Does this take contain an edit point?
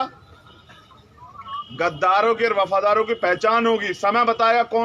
no; 0 cuts

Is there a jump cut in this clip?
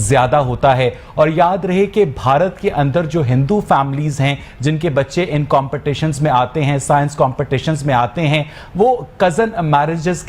no; 0 cuts

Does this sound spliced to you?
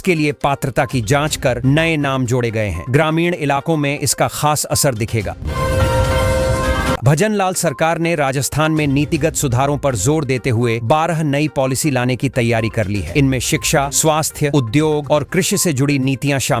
yes; 2 cuts; at 5.4 s, 7.0 s

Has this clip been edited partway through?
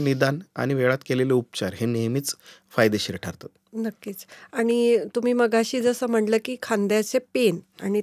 no; 0 cuts

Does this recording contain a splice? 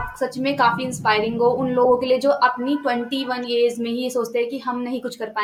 no; 0 cuts

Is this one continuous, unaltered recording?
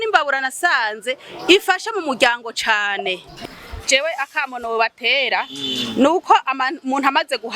no; 1 cut; at 3.3 s

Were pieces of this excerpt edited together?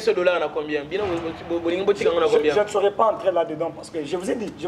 no; 0 cuts

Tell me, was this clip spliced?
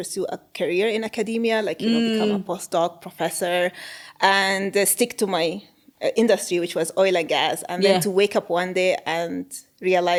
no; 0 cuts

